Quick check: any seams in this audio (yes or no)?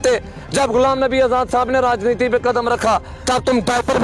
yes